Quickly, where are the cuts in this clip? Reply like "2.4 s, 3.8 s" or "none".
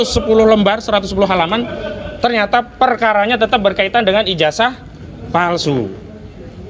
none